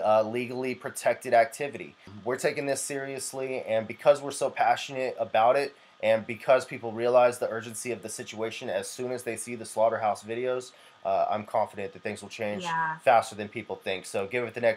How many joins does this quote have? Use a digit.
1